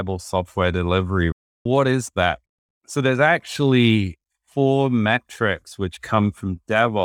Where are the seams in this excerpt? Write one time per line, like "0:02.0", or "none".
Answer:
none